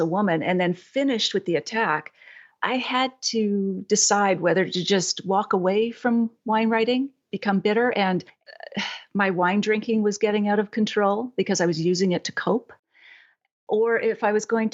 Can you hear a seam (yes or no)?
no